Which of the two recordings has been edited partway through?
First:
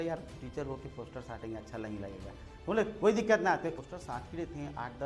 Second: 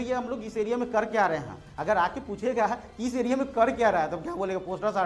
first; 1 cut; at 3.8 s

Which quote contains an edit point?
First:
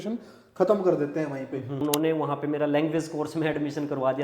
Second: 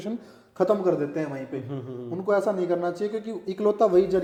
first; 1 cut; at 1.8 s

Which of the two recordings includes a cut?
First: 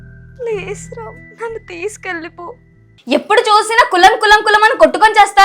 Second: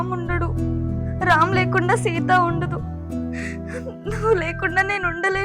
first; 1 cut; at 2.9 s

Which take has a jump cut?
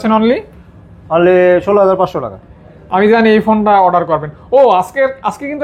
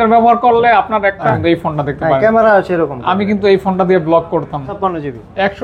second; 2 cuts; at 1.3 s, 4.8 s

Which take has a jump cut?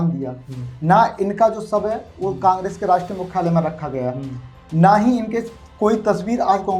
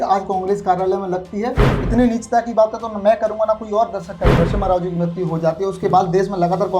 second; 2 cuts; at 1.7 s, 4.3 s

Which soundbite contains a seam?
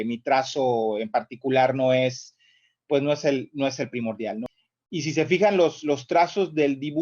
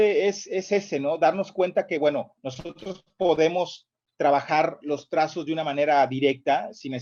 first; 1 cut; at 4.4 s

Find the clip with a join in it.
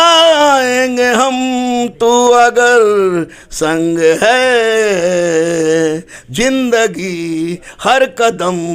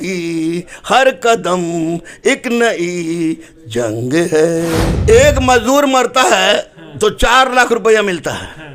second; 1 cut; at 4.9 s

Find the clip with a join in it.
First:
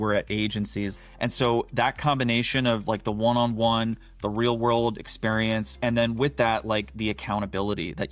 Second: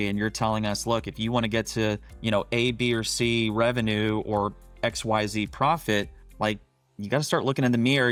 first; 1 cut; at 0.9 s

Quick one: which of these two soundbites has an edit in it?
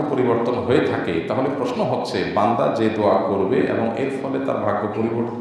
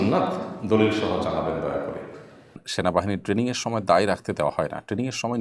second; 1 cut; at 2.6 s

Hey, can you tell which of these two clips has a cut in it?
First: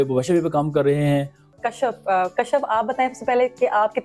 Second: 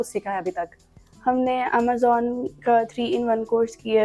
first; 1 cut; at 1.5 s

